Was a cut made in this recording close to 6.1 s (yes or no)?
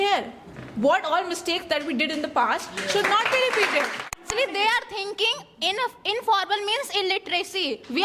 no